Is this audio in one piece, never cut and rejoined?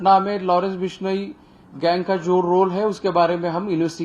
yes; 0 cuts

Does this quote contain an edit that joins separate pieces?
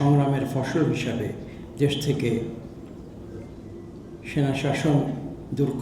no; 0 cuts

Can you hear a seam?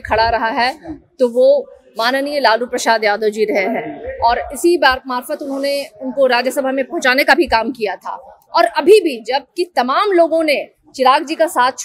no; 0 cuts

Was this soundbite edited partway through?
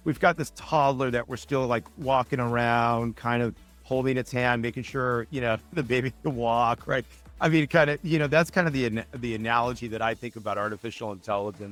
no; 0 cuts

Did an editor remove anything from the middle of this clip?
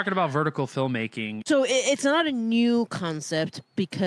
yes; 1 cut; at 1.3 s

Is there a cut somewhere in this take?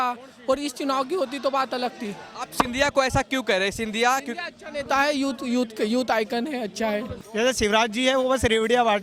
yes; 1 cut; at 7.2 s

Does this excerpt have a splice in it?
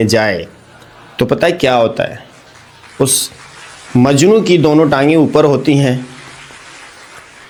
no; 0 cuts

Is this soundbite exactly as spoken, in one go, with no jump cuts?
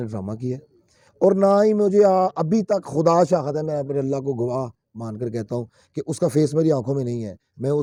yes; 0 cuts

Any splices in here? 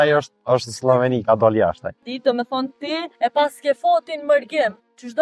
yes; 2 cuts; at 2.0 s, 3.1 s

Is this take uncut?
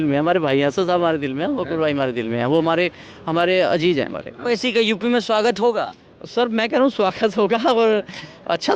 no; 1 cut; at 4.5 s

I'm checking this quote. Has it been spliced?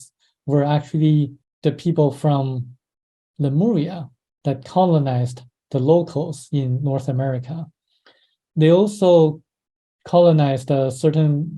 yes; 1 cut; at 1.4 s

